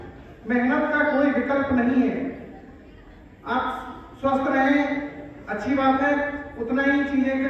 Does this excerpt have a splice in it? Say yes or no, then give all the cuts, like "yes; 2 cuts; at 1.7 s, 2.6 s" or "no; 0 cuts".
no; 0 cuts